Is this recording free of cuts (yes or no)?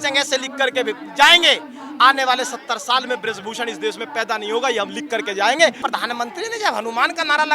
no